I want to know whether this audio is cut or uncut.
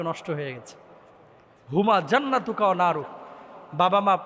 uncut